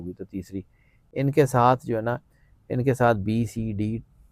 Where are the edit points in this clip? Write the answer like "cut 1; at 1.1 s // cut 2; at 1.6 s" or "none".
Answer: none